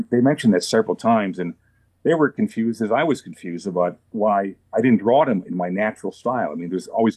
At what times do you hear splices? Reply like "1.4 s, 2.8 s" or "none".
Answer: 4.0 s